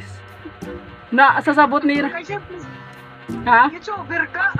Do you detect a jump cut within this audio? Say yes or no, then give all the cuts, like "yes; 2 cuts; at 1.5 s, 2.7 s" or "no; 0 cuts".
no; 0 cuts